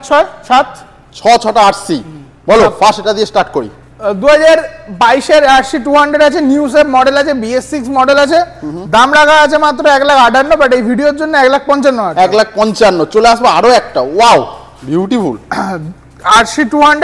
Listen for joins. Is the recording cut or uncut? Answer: uncut